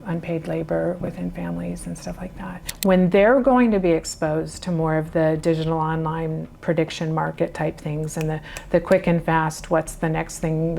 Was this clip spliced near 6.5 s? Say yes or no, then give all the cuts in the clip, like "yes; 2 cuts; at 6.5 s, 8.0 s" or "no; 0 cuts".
no; 1 cut; at 2.6 s